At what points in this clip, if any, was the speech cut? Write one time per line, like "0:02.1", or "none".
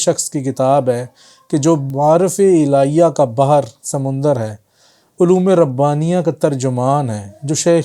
0:01.9